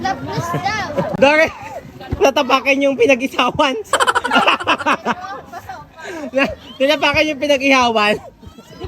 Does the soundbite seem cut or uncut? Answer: cut